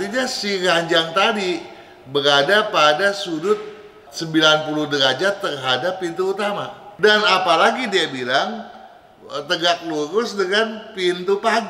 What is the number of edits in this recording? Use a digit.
1